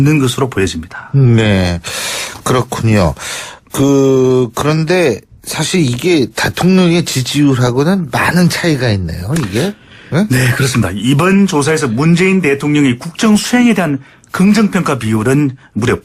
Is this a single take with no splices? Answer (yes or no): no